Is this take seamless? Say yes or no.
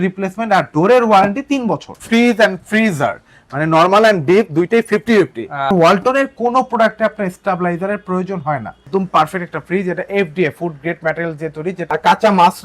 no